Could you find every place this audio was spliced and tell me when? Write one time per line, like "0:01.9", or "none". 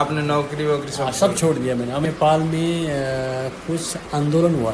0:02.1